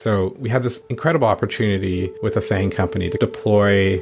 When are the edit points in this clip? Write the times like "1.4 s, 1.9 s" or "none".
0.9 s, 2.1 s